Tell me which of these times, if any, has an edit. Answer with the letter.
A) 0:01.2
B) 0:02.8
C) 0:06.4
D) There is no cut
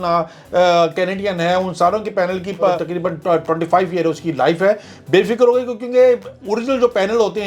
B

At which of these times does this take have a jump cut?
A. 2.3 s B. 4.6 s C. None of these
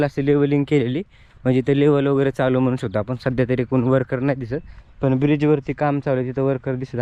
C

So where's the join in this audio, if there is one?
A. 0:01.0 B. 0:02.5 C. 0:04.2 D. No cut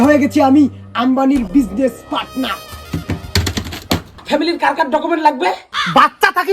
C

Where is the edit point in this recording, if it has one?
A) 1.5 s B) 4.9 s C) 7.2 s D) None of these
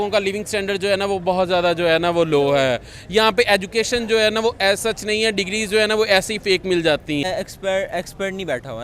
C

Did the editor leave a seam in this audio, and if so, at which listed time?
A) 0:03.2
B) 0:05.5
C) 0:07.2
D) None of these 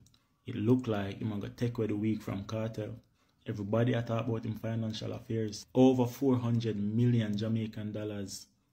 D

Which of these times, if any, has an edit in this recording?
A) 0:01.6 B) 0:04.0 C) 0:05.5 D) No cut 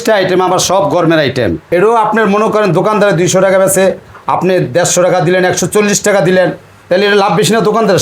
A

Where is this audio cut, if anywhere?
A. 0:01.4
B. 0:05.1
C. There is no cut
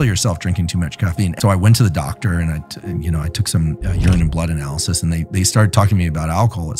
A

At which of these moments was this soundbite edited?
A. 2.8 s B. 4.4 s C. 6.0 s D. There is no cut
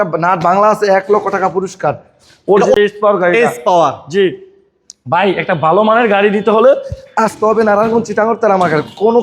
A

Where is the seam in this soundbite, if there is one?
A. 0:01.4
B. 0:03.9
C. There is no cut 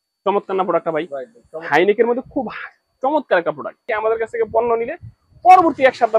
B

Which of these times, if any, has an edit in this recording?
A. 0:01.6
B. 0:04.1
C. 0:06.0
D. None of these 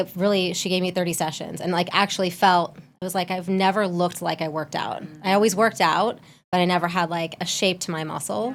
D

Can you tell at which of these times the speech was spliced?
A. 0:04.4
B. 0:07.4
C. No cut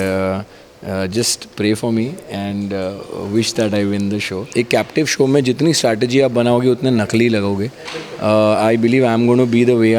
A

